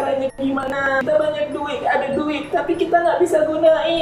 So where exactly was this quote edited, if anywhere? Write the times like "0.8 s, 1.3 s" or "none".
1.0 s